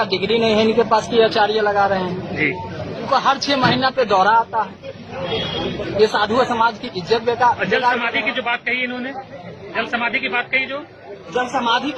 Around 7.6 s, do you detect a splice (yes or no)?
no